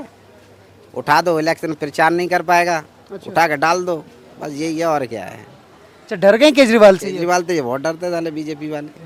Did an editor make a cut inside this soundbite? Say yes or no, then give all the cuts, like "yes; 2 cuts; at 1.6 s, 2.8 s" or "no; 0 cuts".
no; 0 cuts